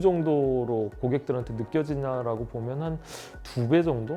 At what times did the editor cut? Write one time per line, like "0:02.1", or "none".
none